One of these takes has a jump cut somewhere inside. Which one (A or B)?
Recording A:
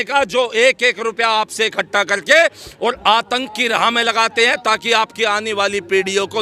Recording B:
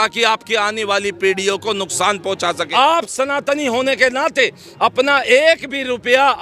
B